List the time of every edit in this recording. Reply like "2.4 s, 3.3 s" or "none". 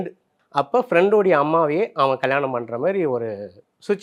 none